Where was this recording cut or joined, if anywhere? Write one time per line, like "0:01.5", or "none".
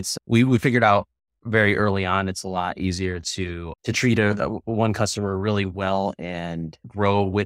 none